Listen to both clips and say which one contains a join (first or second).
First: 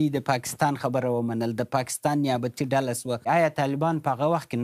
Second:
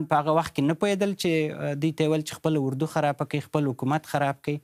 first